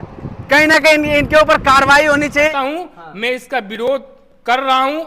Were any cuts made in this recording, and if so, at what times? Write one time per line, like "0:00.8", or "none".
0:02.5